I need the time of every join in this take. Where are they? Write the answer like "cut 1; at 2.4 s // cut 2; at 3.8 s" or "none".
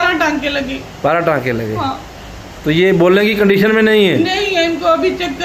none